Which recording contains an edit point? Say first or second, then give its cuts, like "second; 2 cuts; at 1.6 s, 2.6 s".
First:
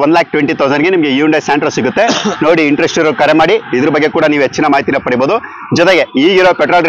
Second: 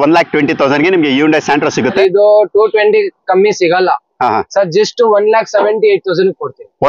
second; 1 cut; at 2.0 s